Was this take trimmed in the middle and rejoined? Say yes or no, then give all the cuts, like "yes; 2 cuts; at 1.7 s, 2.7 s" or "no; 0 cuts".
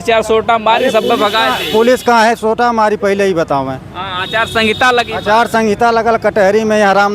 no; 0 cuts